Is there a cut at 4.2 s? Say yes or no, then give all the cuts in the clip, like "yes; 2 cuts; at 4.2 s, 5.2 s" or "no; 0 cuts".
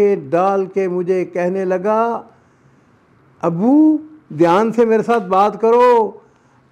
no; 0 cuts